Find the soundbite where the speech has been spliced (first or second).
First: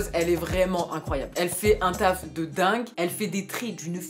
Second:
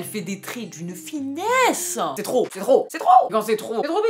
second